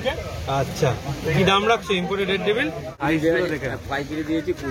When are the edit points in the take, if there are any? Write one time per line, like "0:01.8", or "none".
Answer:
0:03.0

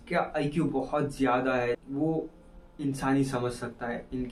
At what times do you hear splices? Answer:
none

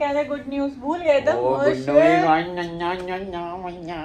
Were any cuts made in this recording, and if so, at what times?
none

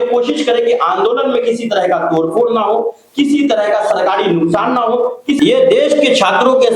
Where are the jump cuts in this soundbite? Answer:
0:05.4

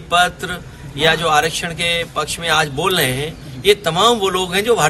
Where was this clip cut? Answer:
none

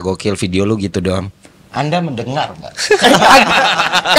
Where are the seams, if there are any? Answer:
none

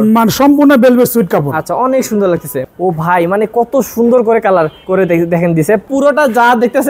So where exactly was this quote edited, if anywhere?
0:02.5
0:04.8
0:05.9

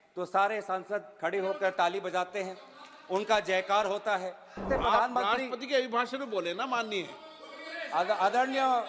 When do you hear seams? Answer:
0:04.7

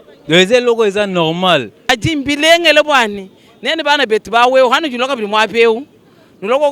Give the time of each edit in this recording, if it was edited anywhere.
0:01.8

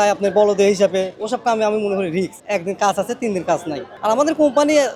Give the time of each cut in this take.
none

